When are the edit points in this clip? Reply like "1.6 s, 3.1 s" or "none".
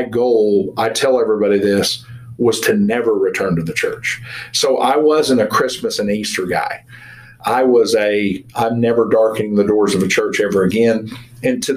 none